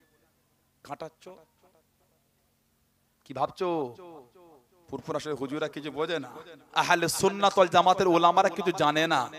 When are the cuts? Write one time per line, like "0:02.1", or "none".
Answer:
none